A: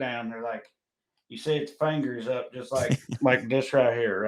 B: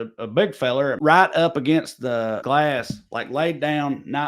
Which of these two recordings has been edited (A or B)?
B